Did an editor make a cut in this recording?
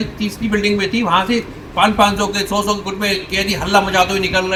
no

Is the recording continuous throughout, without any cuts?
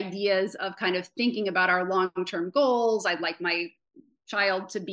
yes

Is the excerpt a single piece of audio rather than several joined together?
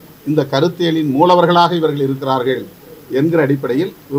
yes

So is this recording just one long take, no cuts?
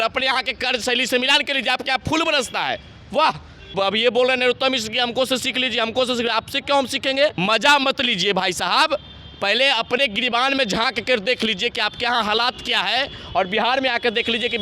no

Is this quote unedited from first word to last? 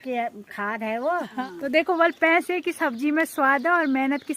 no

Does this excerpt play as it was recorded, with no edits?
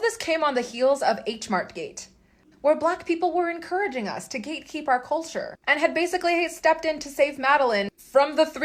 yes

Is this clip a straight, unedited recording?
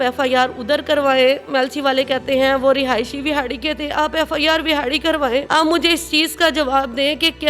no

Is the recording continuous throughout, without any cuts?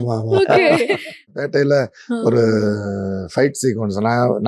no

